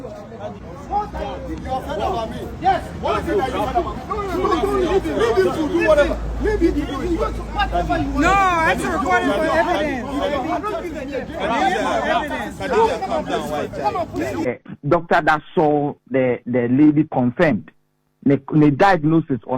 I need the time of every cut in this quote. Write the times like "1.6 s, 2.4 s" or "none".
14.5 s